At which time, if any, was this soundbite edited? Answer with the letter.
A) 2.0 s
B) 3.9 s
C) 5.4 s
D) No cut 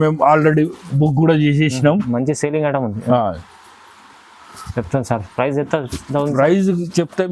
D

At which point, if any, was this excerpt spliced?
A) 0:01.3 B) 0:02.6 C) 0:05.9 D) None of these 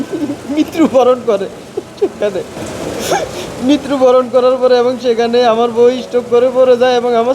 B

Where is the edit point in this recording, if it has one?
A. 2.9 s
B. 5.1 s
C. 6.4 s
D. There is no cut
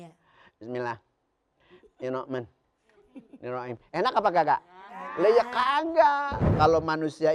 C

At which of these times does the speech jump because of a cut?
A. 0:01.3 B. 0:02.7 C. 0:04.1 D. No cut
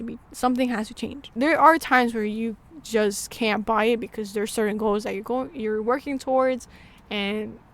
A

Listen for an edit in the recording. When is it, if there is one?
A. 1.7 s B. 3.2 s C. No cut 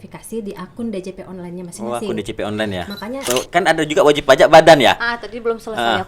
B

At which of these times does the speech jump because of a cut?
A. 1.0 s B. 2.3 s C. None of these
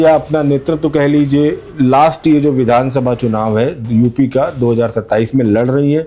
C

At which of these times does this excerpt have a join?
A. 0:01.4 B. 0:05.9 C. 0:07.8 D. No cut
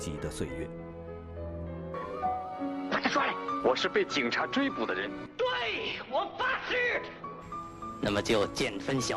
B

